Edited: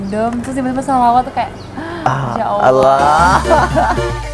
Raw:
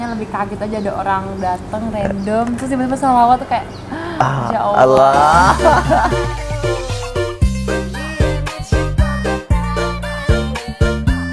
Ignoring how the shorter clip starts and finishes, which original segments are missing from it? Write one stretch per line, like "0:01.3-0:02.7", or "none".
none